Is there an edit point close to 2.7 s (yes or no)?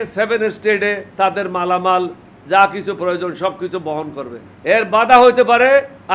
no